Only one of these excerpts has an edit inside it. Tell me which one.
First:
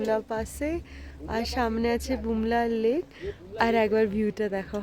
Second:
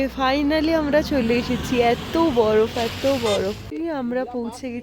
second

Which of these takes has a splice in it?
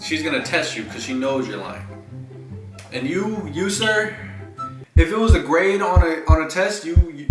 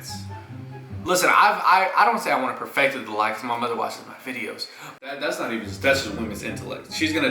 second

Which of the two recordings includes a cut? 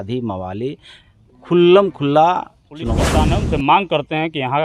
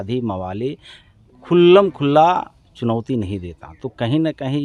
first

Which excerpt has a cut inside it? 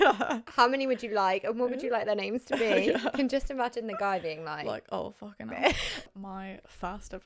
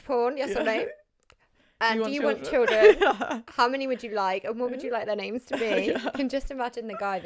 first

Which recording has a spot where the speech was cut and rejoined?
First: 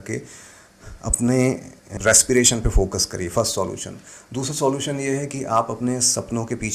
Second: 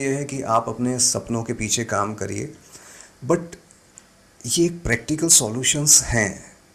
first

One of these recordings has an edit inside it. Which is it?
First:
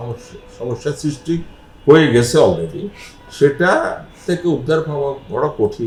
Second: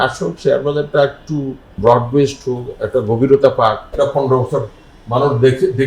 second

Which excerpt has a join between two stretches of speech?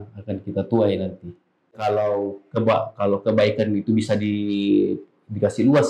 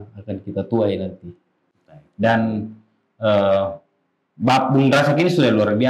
first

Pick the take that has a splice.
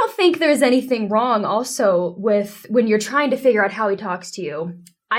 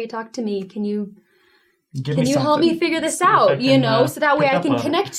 second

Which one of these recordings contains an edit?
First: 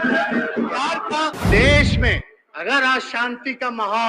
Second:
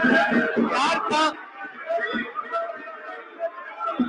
first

